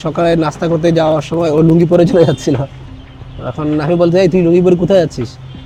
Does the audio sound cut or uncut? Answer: uncut